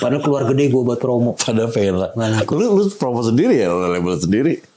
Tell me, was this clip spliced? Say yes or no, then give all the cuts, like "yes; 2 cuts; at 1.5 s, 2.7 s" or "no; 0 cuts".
no; 0 cuts